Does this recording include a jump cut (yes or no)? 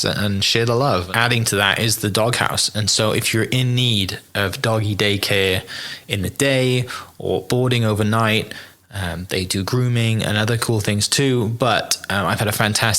yes